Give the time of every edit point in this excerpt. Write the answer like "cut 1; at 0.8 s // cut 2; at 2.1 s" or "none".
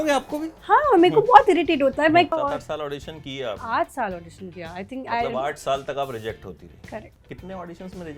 cut 1; at 2.3 s // cut 2; at 7.2 s